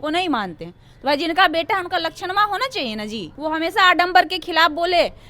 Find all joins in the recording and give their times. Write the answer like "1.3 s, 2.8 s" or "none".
3.3 s

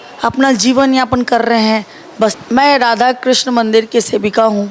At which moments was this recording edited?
2.4 s

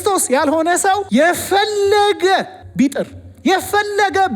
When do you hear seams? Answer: 1.0 s, 2.6 s

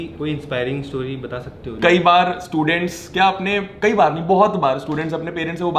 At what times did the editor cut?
1.7 s

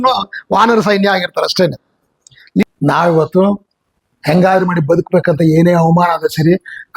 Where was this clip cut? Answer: 2.6 s

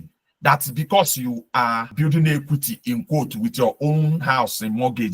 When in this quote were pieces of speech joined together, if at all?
1.9 s

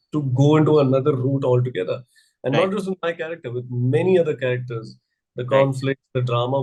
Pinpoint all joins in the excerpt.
none

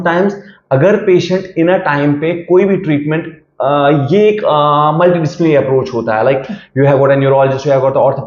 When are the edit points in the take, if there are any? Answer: none

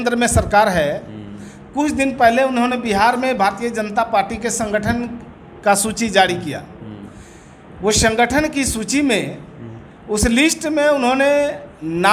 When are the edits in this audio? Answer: none

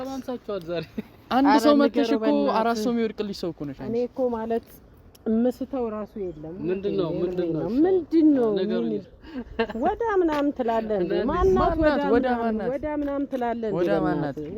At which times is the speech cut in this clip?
9.0 s

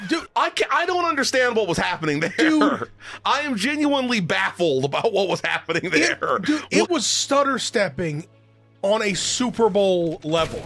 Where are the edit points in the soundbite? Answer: 6.9 s

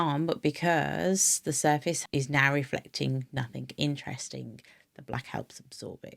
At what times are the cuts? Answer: 2.0 s

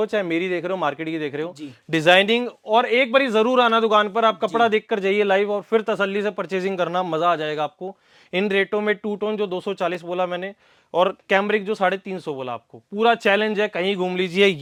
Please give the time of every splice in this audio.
none

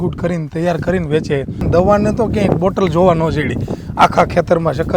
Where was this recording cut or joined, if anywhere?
1.7 s

